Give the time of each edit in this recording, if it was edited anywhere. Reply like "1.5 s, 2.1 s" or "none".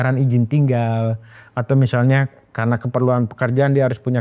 none